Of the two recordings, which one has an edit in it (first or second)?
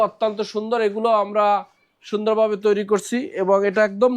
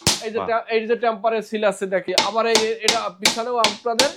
second